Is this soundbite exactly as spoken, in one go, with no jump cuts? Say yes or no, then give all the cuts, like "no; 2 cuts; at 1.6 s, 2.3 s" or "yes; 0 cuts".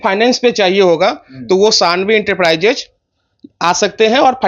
yes; 0 cuts